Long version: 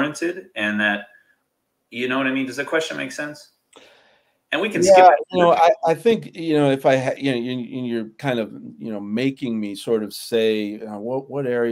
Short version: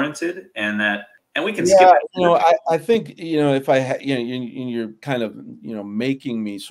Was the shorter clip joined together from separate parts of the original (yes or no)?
yes